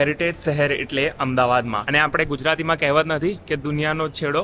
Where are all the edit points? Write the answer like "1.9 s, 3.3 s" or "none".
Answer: 1.9 s